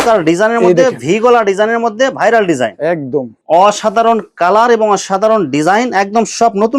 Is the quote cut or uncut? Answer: cut